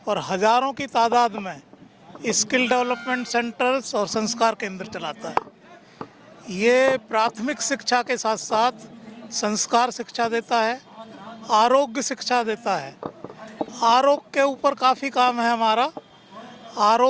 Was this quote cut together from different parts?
no; 0 cuts

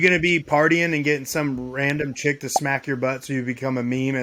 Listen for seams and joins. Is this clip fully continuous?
yes; 0 cuts

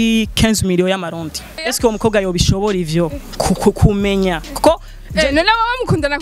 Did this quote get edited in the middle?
yes; 1 cut; at 1.7 s

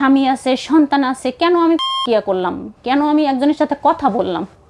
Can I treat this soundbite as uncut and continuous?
yes; 0 cuts

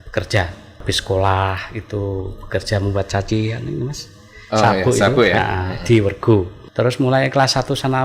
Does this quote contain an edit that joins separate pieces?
yes; 2 cuts; at 0.8 s, 6.6 s

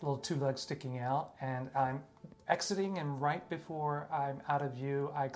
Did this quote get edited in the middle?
no; 0 cuts

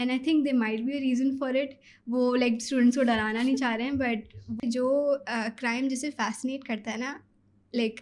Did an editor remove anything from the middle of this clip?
yes; 1 cut; at 4.5 s

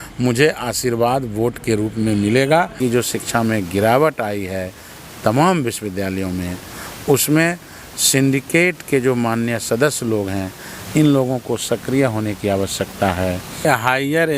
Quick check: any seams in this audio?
yes; 2 cuts; at 2.8 s, 13.7 s

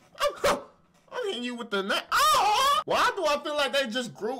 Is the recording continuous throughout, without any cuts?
no; 1 cut; at 2.8 s

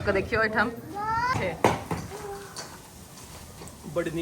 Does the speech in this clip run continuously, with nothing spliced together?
no; 1 cut; at 1.4 s

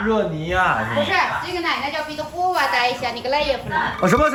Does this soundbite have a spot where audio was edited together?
no; 0 cuts

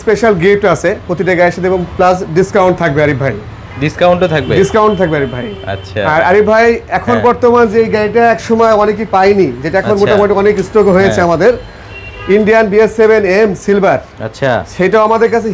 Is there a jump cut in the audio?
no; 0 cuts

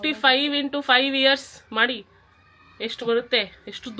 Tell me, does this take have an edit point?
no; 0 cuts

